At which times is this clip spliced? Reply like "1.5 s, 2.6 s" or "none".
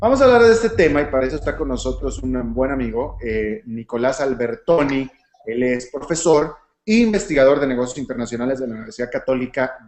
7.6 s

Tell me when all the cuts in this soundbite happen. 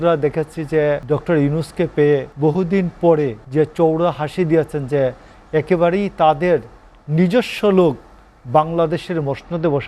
1.0 s, 2.3 s, 3.4 s

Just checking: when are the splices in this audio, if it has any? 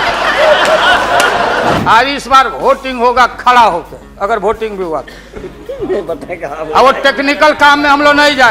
1.8 s

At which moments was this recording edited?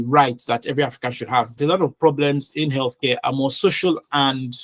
1.5 s

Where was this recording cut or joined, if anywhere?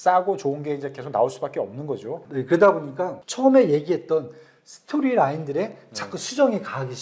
2.2 s, 3.2 s

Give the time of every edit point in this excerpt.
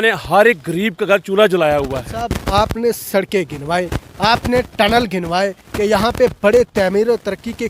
2.4 s

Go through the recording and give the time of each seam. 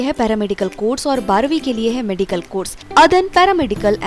2.8 s

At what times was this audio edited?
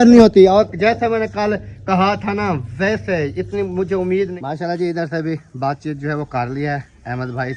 4.3 s

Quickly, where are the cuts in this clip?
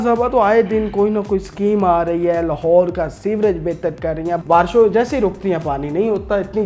4.4 s

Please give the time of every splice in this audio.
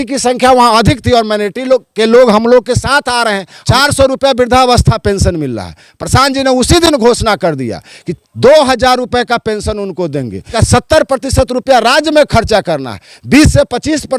3.6 s, 10.5 s

